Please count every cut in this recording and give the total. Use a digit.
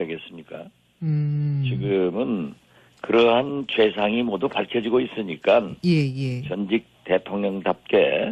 1